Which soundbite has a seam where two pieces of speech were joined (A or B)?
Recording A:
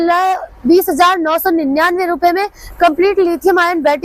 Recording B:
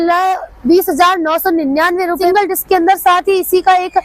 B